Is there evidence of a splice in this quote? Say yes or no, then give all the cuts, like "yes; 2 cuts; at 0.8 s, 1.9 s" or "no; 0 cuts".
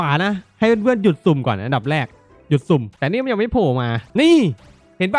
yes; 2 cuts; at 2.9 s, 4.0 s